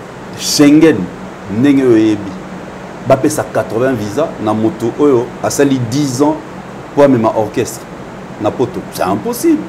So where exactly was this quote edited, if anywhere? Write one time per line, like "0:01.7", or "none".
none